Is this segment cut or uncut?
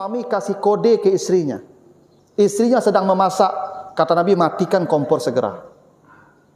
uncut